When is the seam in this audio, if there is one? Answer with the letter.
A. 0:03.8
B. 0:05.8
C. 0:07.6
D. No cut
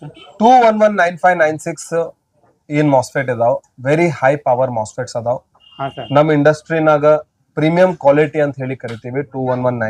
D